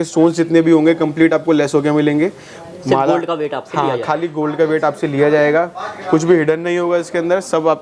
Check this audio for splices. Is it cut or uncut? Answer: uncut